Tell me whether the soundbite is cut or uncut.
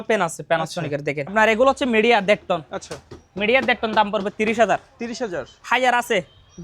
cut